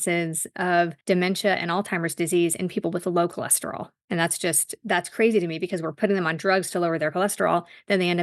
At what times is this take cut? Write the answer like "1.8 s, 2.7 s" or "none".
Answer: 1.0 s, 3.9 s